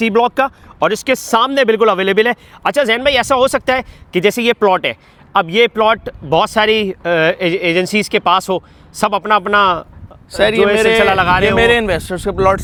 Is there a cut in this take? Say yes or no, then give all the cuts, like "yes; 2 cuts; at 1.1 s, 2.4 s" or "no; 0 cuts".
no; 0 cuts